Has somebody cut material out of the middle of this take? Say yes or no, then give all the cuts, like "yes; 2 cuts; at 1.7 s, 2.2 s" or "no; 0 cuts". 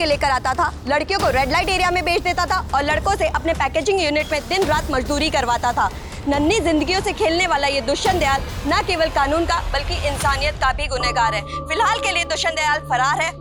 no; 0 cuts